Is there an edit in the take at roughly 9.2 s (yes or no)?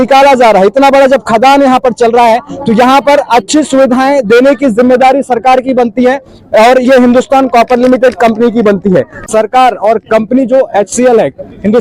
yes